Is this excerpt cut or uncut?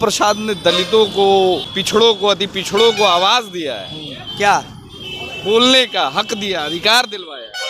uncut